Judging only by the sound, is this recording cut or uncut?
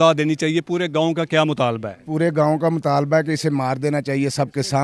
uncut